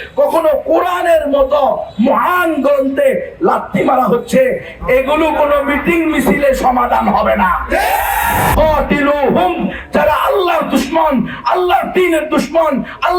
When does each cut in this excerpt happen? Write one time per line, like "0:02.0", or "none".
0:08.5